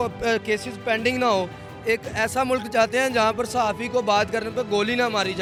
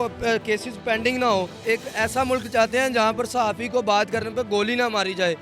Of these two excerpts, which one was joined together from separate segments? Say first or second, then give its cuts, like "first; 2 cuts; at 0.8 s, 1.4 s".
second; 1 cut; at 1.5 s